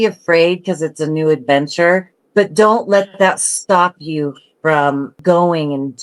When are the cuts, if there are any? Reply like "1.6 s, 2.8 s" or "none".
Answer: 2.2 s, 5.1 s